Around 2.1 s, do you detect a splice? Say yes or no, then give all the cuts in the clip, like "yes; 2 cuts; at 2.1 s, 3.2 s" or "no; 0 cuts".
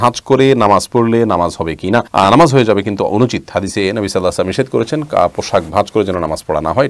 no; 0 cuts